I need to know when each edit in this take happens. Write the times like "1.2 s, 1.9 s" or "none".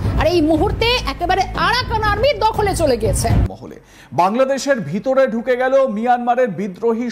3.4 s